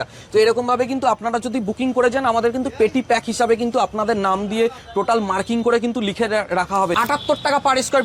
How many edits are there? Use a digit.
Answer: 1